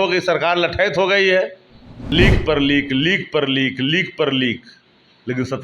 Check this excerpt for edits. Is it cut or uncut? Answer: cut